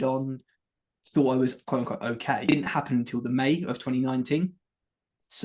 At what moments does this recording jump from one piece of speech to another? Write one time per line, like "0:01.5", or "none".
0:02.5